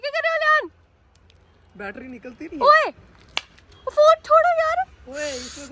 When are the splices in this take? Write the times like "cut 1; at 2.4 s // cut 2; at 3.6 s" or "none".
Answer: none